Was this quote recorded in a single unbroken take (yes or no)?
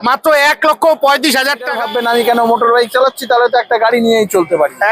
no